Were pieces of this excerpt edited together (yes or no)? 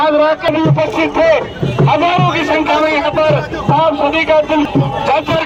no